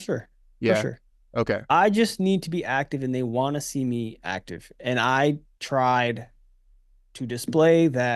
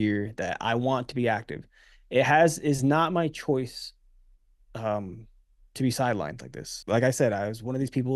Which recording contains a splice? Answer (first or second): second